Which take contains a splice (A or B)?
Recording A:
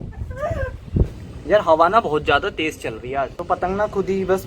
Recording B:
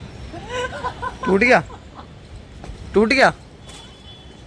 A